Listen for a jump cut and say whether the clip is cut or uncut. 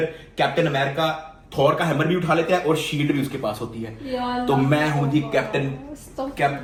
uncut